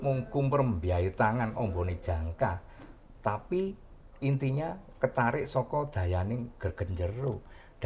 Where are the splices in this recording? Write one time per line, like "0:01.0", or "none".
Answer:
none

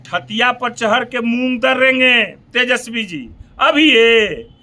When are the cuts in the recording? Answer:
none

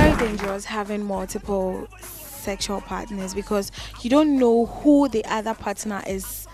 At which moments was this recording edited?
none

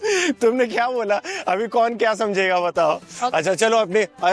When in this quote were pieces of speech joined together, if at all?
none

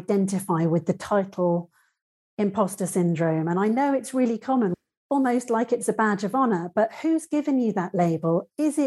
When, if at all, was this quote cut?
0:04.7

